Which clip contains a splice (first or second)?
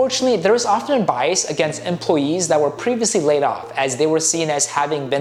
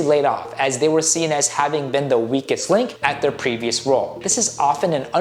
second